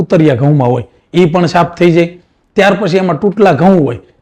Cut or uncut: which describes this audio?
uncut